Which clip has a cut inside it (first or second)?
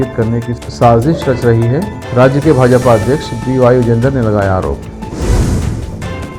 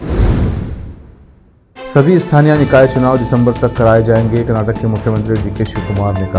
second